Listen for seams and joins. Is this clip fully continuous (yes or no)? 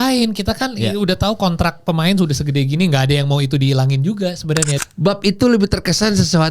no